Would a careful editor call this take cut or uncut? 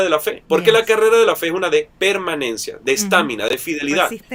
uncut